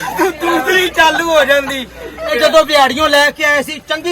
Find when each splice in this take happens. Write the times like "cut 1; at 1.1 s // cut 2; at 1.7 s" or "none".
cut 1; at 2.3 s